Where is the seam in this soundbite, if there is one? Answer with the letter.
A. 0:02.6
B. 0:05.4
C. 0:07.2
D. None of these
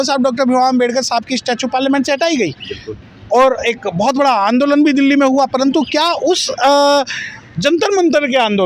D